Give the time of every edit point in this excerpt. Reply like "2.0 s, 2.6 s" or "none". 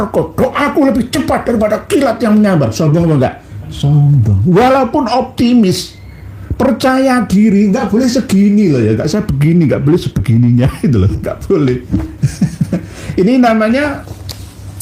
none